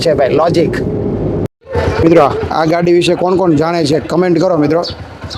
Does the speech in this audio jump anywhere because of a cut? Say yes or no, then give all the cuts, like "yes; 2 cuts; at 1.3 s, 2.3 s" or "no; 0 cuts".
yes; 1 cut; at 1.6 s